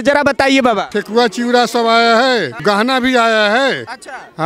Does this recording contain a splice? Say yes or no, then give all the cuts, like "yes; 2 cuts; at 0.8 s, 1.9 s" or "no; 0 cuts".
yes; 2 cuts; at 0.9 s, 2.5 s